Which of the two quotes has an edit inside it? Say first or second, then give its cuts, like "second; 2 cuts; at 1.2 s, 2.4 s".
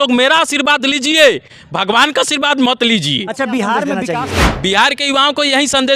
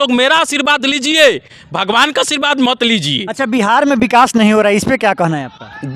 first; 1 cut; at 4.0 s